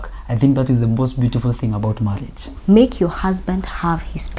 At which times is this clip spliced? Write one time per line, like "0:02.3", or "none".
0:02.4